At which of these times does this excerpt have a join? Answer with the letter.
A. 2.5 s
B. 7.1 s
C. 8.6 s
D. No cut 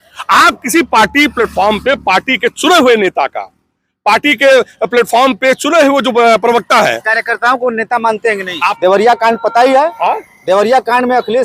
C